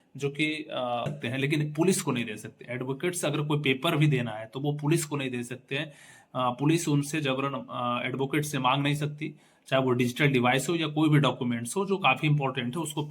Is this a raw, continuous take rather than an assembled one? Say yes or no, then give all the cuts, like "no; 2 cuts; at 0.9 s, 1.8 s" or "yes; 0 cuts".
no; 1 cut; at 1.2 s